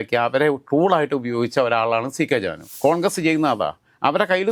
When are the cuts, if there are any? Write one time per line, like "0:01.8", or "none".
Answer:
0:02.6